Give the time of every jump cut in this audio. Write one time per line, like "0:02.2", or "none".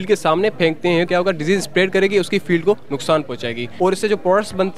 0:01.1
0:03.6